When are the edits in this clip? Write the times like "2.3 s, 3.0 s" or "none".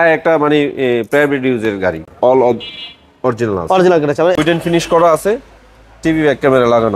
2.0 s, 4.4 s